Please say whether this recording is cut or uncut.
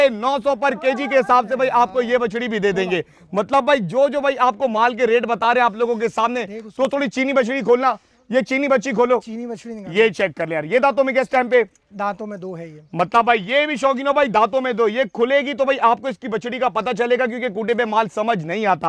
uncut